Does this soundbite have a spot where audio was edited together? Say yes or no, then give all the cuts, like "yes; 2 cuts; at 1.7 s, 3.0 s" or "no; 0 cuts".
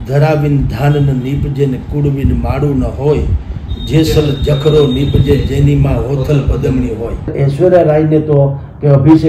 yes; 1 cut; at 7.3 s